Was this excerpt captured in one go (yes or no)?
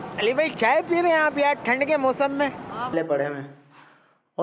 no